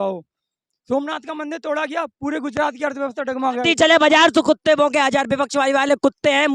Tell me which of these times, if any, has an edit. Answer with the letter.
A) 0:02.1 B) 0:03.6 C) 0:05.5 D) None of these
B